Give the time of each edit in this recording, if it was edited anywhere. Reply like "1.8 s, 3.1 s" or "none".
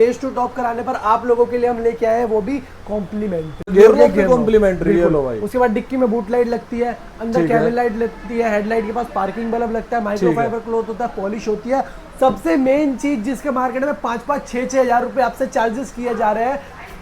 3.6 s